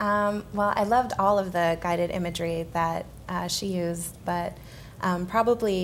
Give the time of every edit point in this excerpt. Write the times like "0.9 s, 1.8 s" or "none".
4.1 s

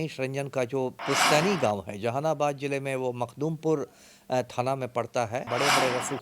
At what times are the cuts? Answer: 1.0 s, 5.5 s

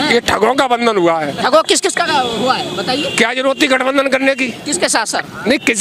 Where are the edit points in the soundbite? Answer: none

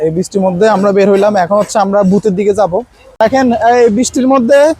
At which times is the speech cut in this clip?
3.0 s

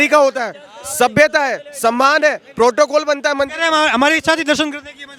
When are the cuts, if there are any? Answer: none

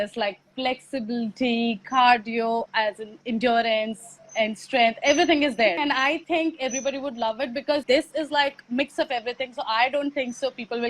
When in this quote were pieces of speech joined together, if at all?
5.8 s, 7.8 s

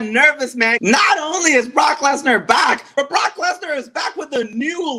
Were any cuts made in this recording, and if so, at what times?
0.8 s, 3.0 s

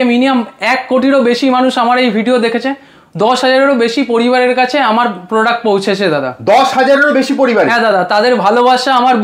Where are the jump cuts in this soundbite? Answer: none

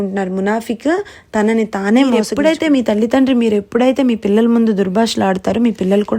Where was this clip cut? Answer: 2.3 s

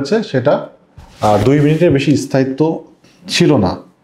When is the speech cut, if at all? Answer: none

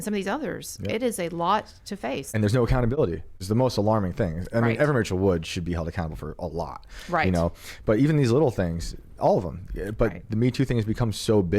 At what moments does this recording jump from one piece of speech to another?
2.3 s, 3.4 s

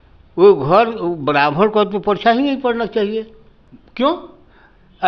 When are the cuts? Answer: none

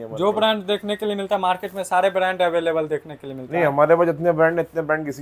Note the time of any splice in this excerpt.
none

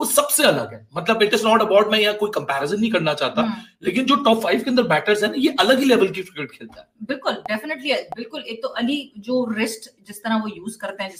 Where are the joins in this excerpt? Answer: none

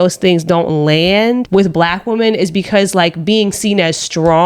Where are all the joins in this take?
none

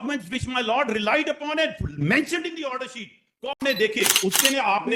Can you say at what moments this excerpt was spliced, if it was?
3.6 s

